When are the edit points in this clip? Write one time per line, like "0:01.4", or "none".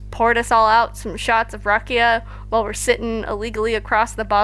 none